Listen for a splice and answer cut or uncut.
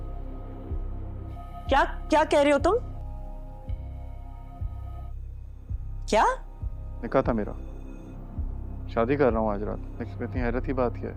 uncut